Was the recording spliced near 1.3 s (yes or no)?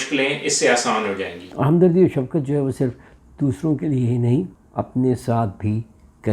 yes